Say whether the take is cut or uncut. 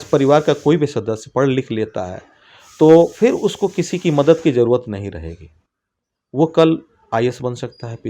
uncut